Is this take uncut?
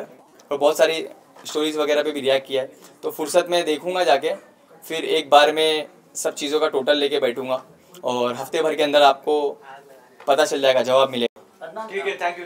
yes; 0 cuts

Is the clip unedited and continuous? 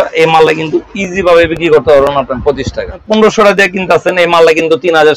no; 1 cut; at 3.0 s

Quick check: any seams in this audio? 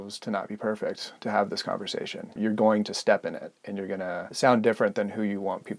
yes; 2 cuts; at 2.3 s, 4.2 s

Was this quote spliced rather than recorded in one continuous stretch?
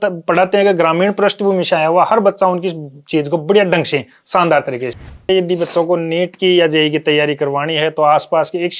yes; 1 cut; at 5.3 s

